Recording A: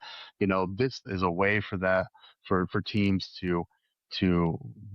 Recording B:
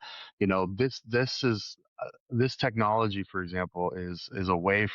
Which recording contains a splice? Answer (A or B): A